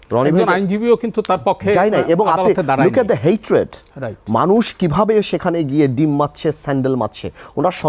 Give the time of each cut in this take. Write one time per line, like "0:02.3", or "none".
none